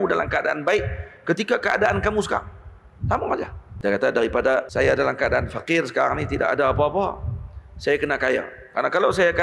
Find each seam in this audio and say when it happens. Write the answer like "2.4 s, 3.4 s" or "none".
3.6 s, 4.7 s